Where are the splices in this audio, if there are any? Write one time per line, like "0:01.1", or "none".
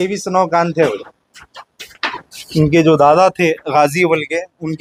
none